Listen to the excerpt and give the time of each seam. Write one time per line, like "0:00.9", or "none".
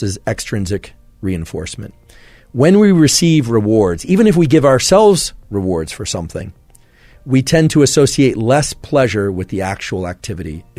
none